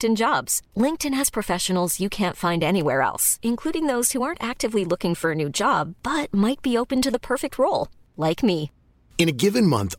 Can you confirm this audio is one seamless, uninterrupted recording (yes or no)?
yes